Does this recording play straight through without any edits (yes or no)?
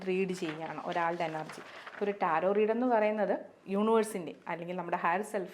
no